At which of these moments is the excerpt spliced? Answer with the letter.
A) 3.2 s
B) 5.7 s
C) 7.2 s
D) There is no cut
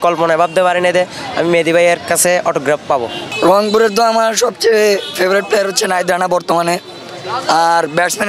A